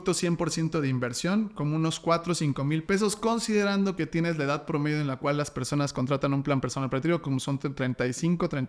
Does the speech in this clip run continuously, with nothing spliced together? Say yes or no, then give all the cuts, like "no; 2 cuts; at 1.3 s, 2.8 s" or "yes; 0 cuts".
yes; 0 cuts